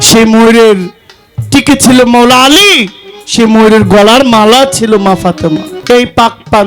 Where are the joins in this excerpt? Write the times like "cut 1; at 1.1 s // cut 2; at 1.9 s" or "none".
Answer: cut 1; at 5.7 s